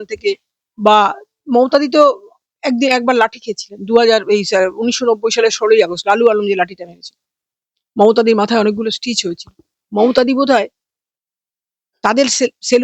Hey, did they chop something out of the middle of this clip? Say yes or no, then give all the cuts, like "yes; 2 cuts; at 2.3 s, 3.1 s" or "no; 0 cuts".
no; 0 cuts